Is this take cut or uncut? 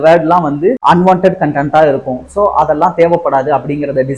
uncut